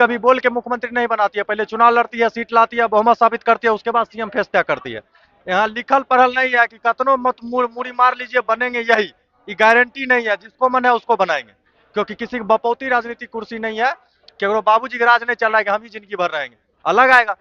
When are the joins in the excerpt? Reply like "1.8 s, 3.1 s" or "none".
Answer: none